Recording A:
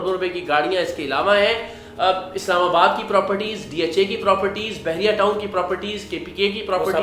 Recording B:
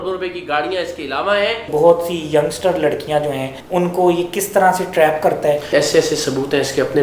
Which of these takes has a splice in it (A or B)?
B